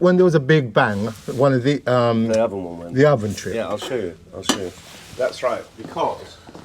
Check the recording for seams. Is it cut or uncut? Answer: uncut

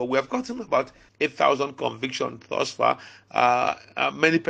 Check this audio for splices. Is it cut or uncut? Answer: cut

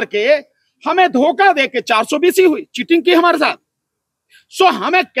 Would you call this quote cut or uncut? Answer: uncut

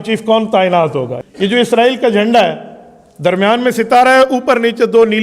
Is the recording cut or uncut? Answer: cut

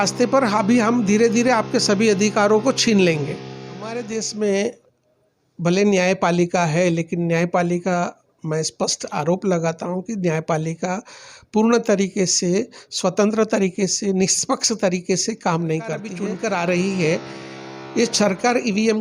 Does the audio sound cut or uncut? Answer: cut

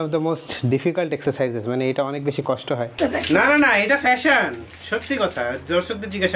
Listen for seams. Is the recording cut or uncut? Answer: cut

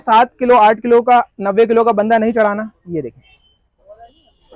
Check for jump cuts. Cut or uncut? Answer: uncut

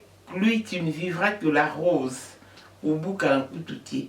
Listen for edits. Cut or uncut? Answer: uncut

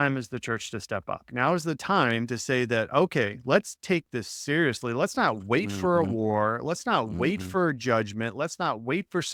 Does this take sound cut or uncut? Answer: uncut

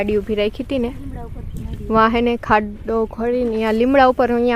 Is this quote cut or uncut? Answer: uncut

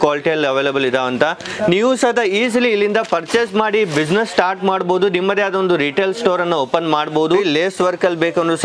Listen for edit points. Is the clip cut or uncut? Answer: cut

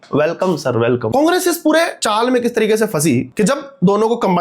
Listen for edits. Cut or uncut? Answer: cut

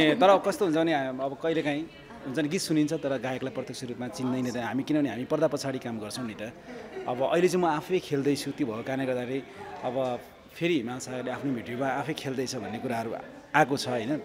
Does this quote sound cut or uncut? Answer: uncut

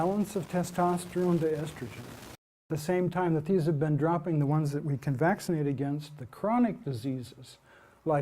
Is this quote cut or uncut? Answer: cut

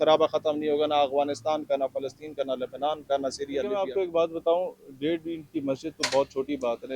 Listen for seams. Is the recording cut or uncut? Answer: cut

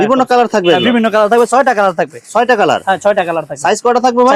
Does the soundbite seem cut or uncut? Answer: uncut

